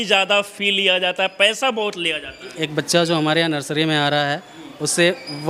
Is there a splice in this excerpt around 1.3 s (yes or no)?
no